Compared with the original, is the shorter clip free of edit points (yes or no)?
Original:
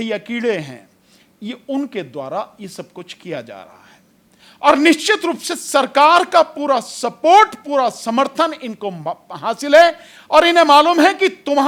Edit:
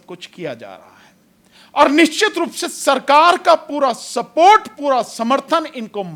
yes